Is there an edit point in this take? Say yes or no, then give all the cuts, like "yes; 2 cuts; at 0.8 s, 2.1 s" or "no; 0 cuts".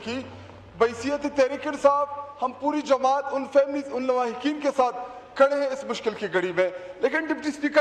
no; 0 cuts